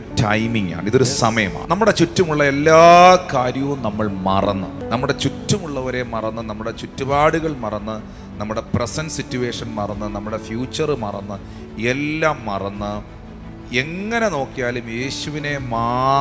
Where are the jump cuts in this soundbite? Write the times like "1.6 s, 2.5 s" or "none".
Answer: 1.6 s, 4.8 s

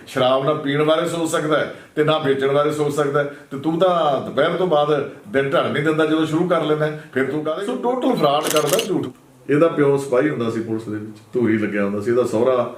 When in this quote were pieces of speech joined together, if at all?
7.5 s, 9.1 s

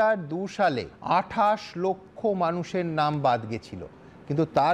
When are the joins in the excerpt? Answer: 0.9 s

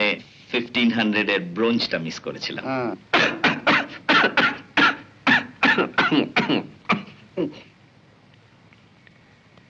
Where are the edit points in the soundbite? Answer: none

